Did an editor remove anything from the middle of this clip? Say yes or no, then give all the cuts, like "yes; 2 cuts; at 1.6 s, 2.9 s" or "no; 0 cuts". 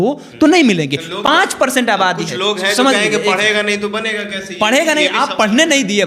no; 0 cuts